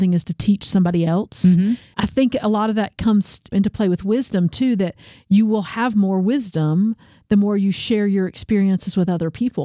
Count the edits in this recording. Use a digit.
2